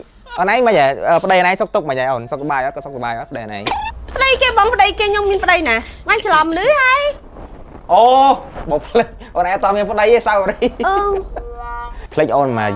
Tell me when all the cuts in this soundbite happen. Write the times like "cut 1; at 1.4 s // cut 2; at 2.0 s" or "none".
cut 1; at 4.0 s